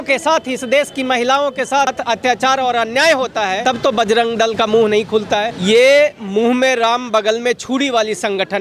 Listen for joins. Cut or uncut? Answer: cut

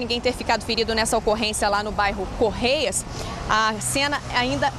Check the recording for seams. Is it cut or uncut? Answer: uncut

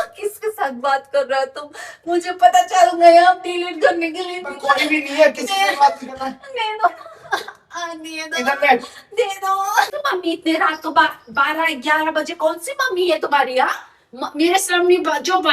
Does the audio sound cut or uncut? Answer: cut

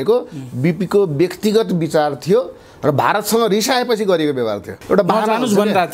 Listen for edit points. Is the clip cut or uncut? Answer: cut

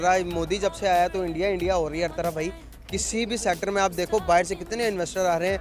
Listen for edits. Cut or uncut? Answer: cut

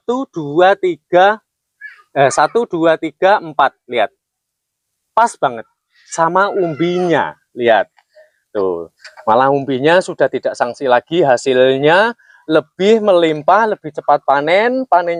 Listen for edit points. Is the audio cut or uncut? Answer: uncut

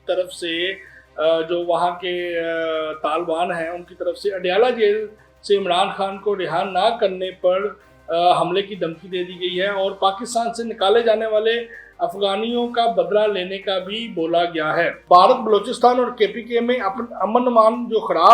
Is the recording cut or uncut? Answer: cut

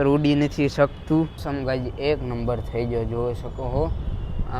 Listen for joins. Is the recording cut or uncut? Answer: cut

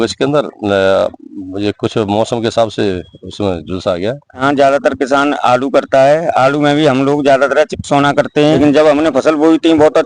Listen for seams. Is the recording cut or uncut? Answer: cut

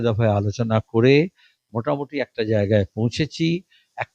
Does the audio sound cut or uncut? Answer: uncut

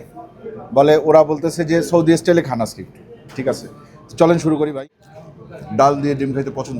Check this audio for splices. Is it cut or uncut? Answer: cut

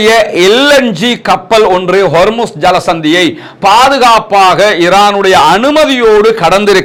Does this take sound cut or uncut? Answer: uncut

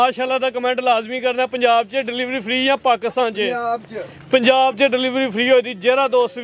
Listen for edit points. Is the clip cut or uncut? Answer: uncut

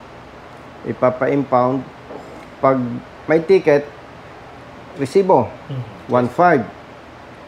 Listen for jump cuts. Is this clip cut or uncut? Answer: uncut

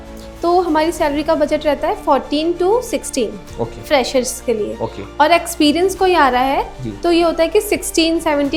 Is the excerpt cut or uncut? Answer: uncut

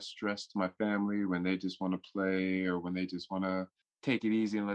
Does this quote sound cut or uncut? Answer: cut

